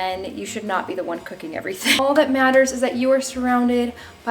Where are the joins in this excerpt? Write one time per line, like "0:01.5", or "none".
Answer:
0:02.0